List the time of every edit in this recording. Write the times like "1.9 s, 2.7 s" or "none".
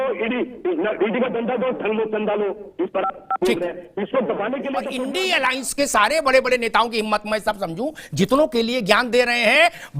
5.0 s